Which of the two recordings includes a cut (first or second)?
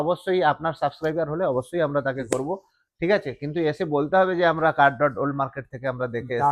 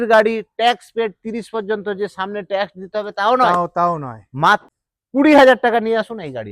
second